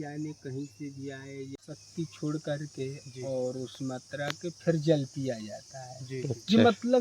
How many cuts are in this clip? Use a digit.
1